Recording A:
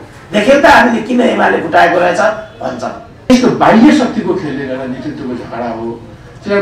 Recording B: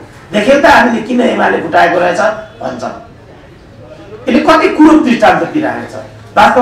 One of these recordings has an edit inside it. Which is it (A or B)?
A